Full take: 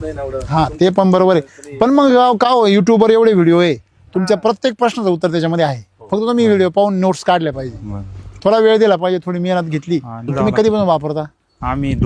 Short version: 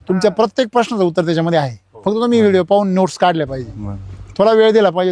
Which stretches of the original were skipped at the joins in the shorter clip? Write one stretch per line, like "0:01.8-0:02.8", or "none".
none

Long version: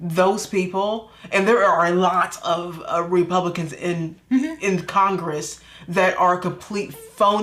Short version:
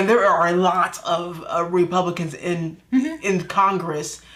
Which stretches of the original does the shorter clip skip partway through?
none

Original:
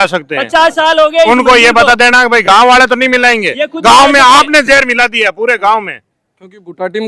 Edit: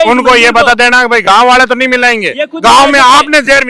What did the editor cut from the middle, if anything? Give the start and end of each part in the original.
none

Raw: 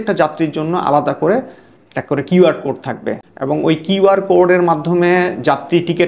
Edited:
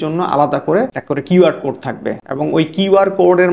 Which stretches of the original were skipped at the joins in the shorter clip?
0:01.5-0:02.0
0:03.2-0:03.3

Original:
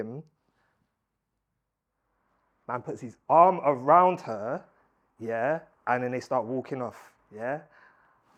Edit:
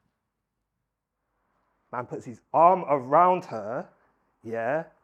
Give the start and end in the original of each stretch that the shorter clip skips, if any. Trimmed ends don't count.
none

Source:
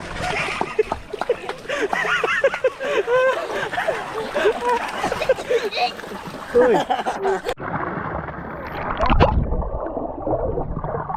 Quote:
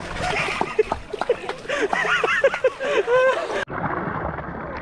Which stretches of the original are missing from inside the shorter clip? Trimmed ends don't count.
0:03.7-0:07.6

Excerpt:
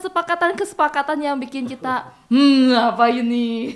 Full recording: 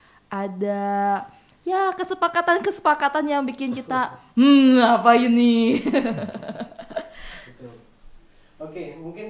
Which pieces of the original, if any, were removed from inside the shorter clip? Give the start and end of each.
none

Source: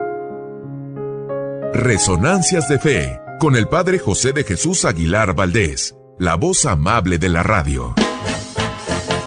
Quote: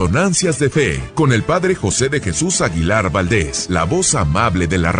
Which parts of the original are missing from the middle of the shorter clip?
0:03.1-0:03.3
0:05.8-0:06.1

